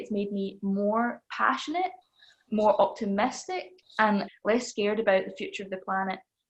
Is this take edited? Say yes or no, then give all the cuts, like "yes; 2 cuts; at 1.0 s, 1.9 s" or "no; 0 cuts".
no; 0 cuts